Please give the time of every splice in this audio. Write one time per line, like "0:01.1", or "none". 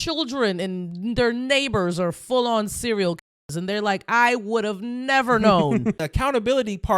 0:06.0